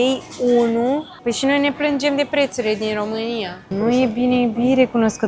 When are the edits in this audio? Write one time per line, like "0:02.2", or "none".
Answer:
0:01.1
0:03.9